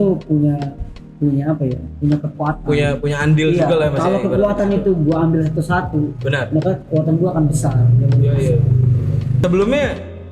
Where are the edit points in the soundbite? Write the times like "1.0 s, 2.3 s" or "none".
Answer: 9.4 s